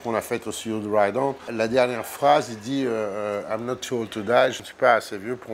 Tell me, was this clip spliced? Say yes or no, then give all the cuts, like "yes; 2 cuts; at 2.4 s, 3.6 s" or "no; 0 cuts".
yes; 2 cuts; at 1.5 s, 4.6 s